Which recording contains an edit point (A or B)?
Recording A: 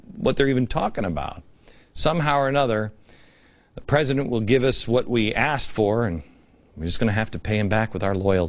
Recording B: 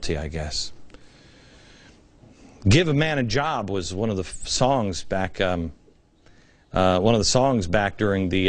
B